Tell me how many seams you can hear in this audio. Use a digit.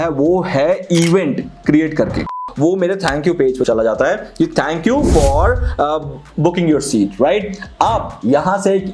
1